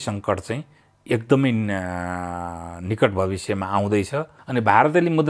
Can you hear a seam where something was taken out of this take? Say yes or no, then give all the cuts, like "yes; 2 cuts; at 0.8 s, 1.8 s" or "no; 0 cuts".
yes; 1 cut; at 4.4 s